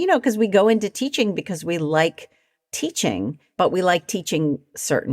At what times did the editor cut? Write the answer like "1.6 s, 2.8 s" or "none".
3.4 s